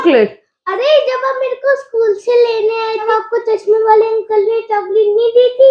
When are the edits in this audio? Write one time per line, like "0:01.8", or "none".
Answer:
0:03.1